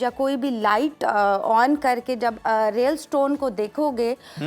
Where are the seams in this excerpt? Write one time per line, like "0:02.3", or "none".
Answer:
none